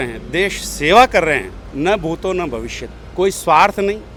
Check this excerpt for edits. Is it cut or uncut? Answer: uncut